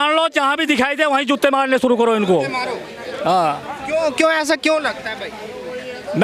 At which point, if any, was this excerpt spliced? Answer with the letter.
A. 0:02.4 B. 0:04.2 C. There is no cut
C